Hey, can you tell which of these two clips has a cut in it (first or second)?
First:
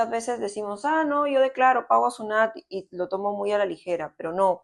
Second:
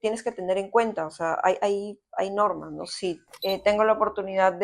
second